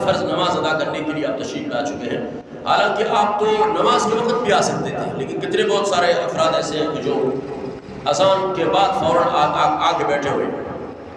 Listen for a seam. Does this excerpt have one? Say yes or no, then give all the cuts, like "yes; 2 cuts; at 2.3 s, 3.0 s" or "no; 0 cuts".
no; 0 cuts